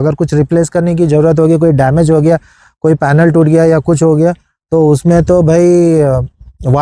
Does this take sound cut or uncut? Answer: uncut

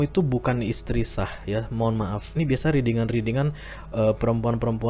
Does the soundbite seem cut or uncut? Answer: cut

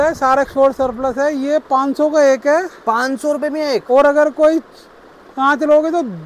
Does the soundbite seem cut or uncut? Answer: uncut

